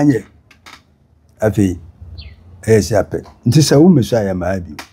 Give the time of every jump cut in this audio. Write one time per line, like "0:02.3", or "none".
none